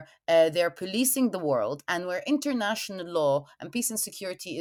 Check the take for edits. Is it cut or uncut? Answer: uncut